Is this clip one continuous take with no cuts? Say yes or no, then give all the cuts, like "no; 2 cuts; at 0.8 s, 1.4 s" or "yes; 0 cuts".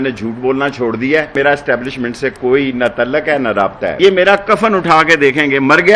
no; 2 cuts; at 1.3 s, 3.9 s